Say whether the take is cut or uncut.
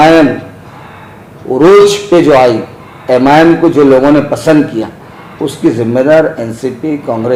uncut